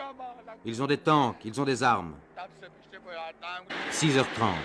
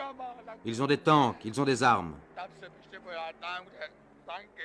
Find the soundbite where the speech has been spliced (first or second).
second